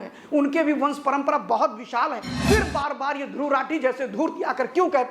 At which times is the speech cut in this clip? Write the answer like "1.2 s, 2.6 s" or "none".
2.3 s